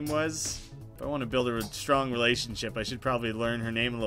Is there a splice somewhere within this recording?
yes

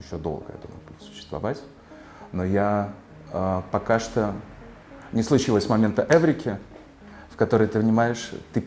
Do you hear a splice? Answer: no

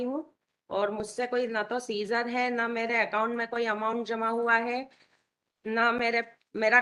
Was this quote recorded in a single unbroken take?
yes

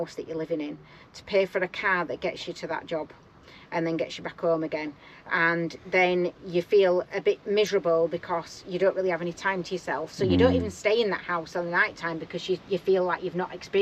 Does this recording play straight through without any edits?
yes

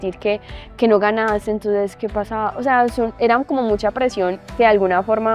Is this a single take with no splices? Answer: no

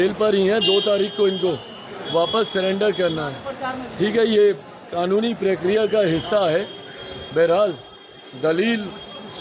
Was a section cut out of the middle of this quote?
no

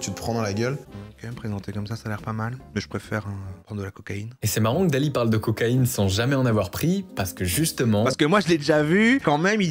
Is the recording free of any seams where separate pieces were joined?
no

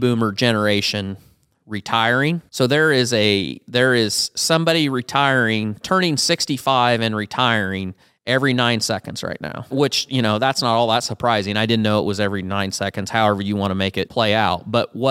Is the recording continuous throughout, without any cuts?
no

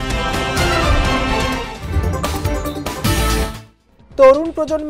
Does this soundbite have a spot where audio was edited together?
yes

